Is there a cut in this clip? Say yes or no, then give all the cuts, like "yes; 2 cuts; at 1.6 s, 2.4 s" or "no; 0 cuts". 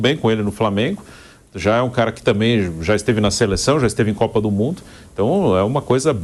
no; 0 cuts